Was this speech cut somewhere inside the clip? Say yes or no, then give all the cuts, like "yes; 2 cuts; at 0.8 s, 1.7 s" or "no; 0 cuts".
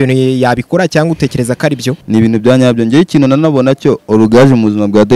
yes; 1 cut; at 1.9 s